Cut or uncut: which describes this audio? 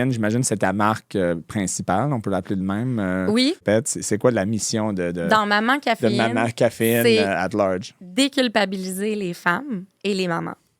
cut